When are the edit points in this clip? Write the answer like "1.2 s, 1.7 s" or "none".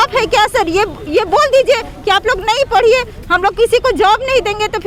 none